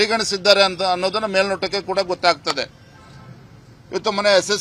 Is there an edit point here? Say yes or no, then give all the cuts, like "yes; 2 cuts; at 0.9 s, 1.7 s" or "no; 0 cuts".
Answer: no; 0 cuts